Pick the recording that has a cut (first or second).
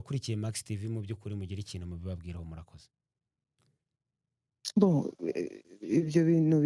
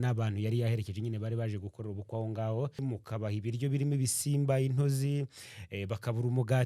second